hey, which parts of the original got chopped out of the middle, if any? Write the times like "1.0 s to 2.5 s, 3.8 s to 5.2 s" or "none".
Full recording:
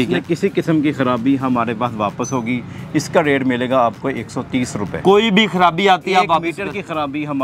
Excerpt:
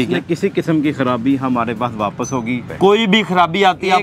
2.7 s to 4.9 s

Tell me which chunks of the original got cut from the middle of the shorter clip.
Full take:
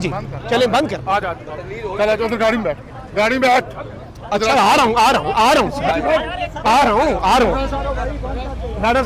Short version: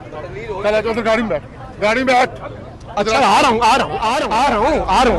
5.6 s to 6.6 s

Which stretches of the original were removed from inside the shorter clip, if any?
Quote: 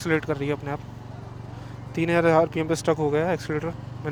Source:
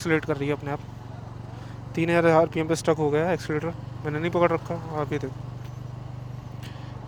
none

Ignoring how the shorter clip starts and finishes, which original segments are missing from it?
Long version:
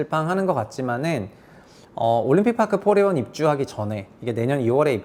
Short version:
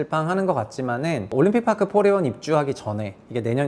1.3 s to 2.2 s

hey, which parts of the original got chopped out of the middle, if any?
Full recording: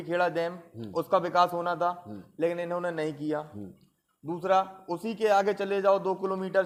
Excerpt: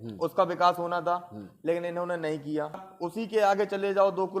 3.6 s to 4.8 s

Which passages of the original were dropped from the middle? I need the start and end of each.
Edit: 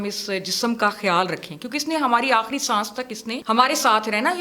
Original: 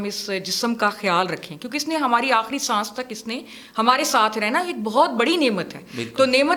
3.3 s to 3.6 s

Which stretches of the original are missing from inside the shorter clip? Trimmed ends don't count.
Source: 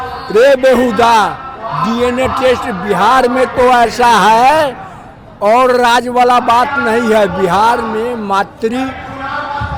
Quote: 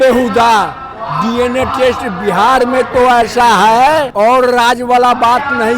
4.7 s to 5.4 s

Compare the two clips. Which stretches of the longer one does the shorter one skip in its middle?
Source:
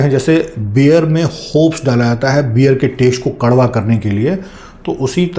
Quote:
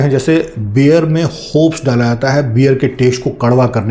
none

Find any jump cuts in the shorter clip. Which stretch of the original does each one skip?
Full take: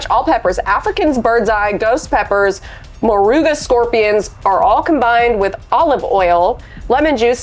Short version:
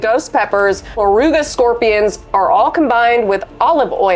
2.8 s to 3.1 s

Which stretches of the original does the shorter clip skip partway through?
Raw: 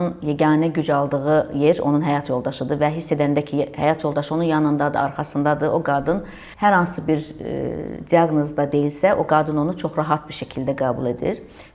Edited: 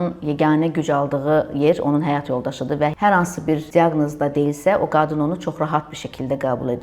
2.9 s to 6.6 s, 7.3 s to 8.0 s

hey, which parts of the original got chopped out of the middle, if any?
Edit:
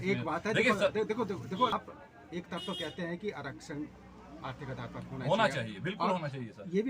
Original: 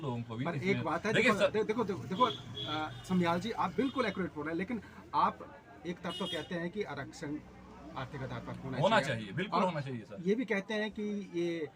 2.3 s to 5.3 s

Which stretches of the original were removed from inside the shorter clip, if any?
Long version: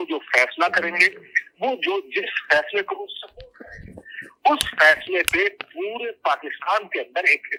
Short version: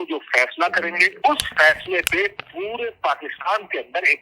1.1 s to 4.3 s

